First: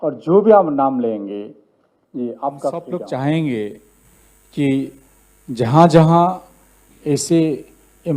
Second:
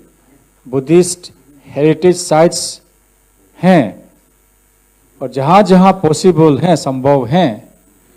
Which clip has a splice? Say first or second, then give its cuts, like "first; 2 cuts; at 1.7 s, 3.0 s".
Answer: first; 1 cut; at 2.8 s